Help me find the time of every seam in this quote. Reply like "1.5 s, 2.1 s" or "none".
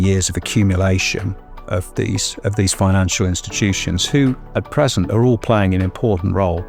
none